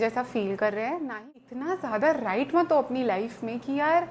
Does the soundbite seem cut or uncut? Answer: cut